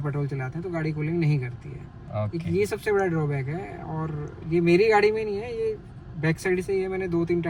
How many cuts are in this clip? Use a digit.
0